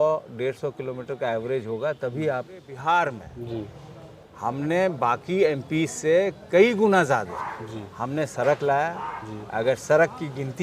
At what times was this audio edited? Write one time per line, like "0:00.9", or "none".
0:02.7